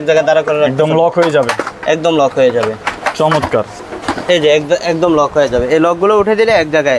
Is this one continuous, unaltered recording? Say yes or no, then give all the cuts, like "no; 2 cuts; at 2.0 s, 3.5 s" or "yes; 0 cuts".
yes; 0 cuts